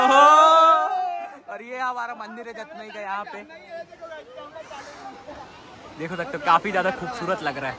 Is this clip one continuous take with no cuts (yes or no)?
yes